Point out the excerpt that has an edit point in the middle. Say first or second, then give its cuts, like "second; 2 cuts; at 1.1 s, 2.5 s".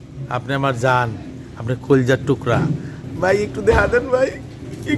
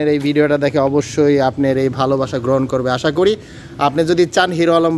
first; 1 cut; at 3.0 s